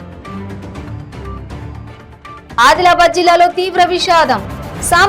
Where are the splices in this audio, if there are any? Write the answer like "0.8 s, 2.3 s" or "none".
1.3 s